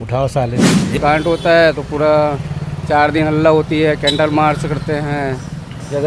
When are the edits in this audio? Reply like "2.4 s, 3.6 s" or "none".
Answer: 1.0 s